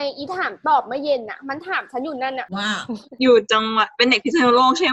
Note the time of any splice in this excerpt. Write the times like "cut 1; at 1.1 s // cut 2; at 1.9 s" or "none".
cut 1; at 3.2 s